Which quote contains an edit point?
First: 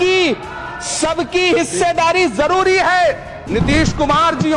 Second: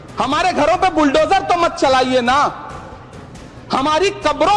first; 1 cut; at 3.3 s

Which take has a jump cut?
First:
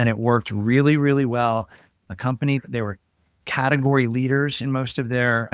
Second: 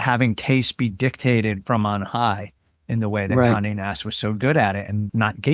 first; 1 cut; at 2.3 s

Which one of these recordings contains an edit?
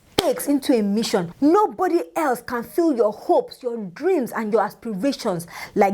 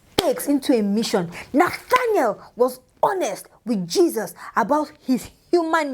second; 1 cut; at 1.3 s

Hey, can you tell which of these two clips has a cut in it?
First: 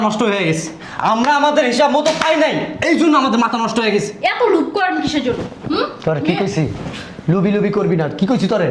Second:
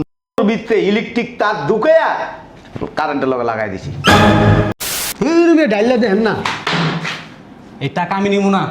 second; 1 cut; at 4.8 s

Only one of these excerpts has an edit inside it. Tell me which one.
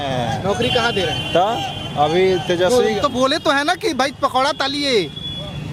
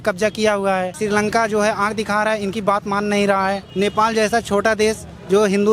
second; 2 cuts; at 1.0 s, 3.7 s

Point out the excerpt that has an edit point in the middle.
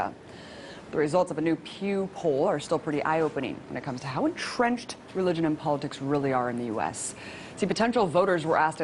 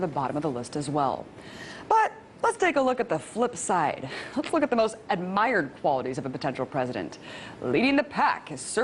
second; 1 cut; at 6.0 s

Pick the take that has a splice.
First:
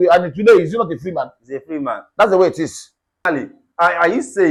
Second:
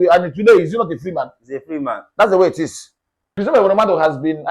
second; 1 cut; at 3.3 s

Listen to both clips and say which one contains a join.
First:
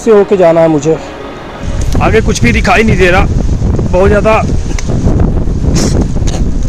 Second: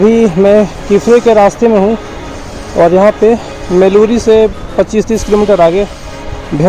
first; 1 cut; at 1.8 s

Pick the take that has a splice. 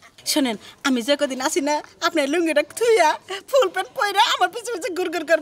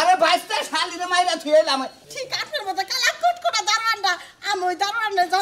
second; 1 cut; at 2.0 s

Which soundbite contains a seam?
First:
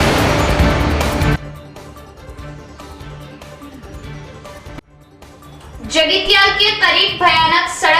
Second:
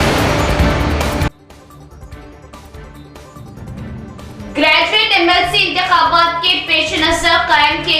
second; 1 cut; at 1.0 s

